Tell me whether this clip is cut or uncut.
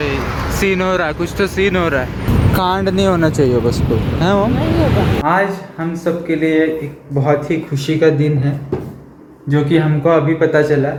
uncut